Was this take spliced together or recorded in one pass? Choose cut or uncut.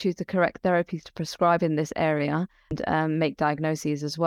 cut